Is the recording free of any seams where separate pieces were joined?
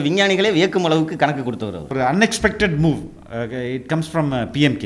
no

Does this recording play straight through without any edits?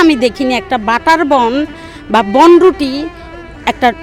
yes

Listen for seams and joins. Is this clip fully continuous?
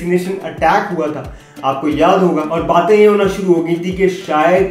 yes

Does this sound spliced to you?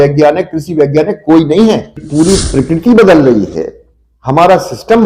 yes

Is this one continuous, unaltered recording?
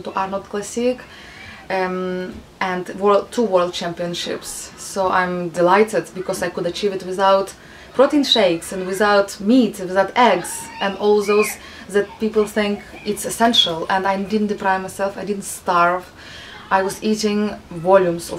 yes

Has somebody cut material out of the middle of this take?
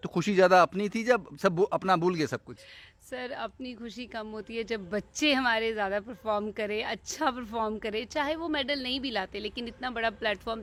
no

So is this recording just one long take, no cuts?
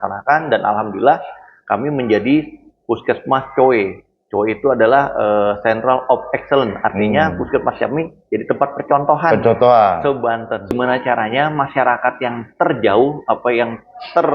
no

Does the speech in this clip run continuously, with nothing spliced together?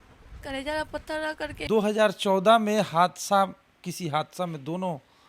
no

